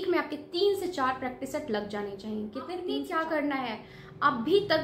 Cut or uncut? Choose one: cut